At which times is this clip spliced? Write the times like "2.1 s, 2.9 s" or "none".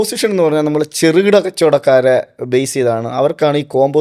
none